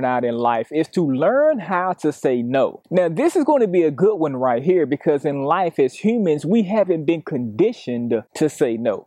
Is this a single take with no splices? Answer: yes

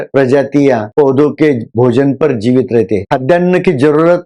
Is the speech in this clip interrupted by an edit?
yes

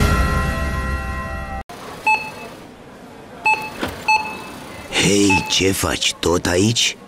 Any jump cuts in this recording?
yes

